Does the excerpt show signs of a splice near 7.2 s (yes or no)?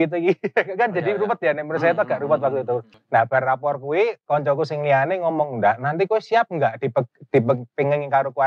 no